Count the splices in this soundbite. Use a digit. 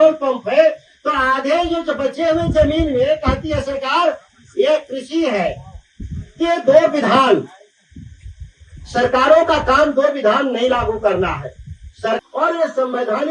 1